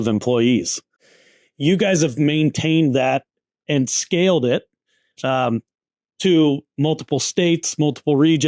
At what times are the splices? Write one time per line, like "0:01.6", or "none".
0:01.0

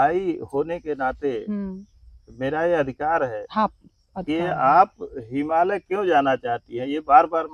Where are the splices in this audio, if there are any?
none

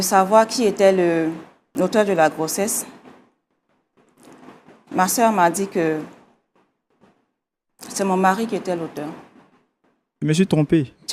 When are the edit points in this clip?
0:01.7
0:10.1

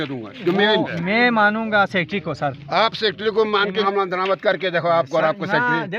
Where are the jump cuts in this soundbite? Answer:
0:01.0
0:03.8

